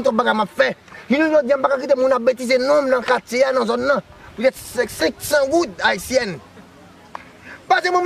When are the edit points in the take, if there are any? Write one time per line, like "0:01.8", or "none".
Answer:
0:01.3